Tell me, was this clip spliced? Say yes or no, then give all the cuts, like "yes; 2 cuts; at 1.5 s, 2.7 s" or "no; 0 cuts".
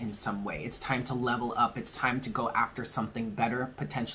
no; 0 cuts